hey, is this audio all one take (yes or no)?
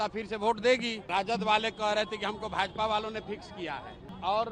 no